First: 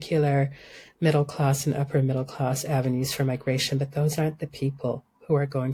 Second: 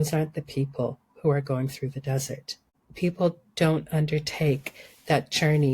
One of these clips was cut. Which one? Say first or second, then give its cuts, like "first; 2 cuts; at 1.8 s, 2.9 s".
second; 1 cut; at 2.6 s